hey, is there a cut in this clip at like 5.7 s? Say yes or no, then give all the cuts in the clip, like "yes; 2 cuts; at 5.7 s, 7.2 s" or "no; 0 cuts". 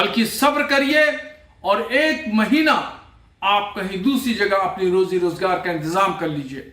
yes; 1 cut; at 5.7 s